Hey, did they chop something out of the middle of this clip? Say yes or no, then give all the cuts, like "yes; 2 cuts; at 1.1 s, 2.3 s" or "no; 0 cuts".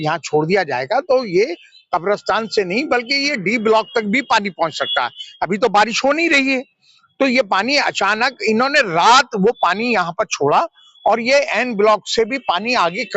no; 0 cuts